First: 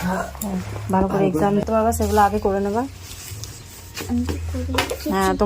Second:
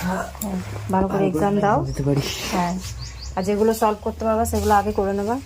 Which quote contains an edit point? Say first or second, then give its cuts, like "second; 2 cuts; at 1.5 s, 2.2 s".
first; 1 cut; at 1.6 s